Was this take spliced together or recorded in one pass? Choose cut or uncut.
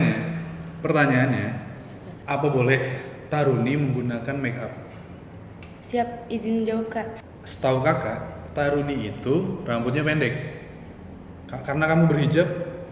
cut